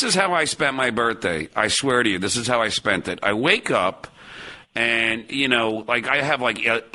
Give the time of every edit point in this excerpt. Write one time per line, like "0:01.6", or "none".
none